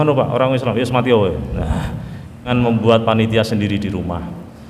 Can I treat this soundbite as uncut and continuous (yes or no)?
no